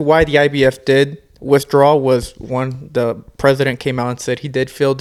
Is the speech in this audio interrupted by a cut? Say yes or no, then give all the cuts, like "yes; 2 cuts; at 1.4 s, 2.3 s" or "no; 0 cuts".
no; 0 cuts